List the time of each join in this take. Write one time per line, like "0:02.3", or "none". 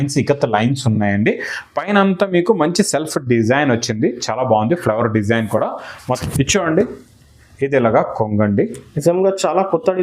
0:06.0